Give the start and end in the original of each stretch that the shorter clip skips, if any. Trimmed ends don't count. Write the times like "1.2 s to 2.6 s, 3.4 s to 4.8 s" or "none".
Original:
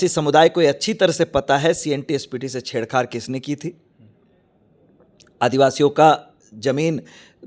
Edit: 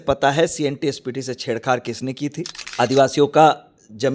3.9 s to 5.2 s